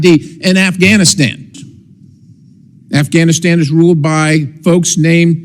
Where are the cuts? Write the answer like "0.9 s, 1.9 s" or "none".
1.6 s